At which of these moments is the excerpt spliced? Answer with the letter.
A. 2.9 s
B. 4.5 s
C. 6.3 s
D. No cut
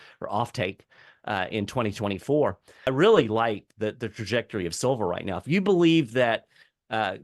A